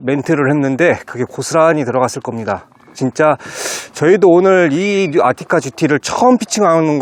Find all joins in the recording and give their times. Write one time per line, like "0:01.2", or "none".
none